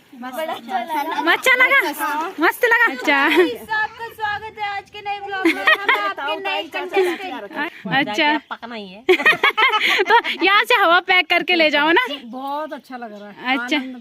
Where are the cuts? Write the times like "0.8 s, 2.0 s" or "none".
3.0 s, 7.5 s, 12.2 s